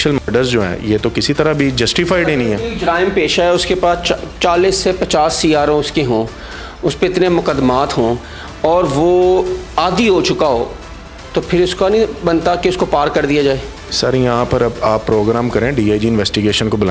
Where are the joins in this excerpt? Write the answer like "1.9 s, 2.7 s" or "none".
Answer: none

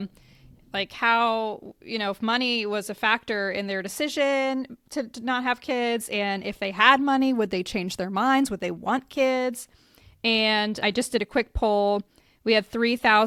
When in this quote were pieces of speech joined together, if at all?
none

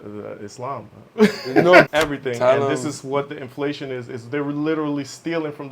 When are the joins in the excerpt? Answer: 1.9 s

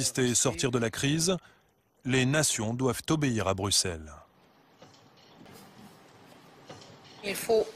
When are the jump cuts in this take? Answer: 5.5 s

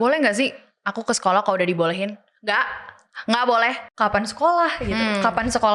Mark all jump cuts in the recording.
3.8 s

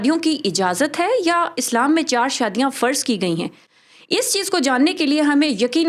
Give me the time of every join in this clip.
none

